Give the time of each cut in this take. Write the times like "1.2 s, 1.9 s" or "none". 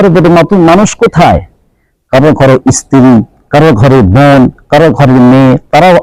none